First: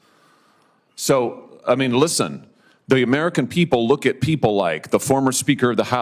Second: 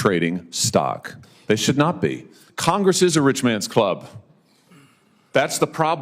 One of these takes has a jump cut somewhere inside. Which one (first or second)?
second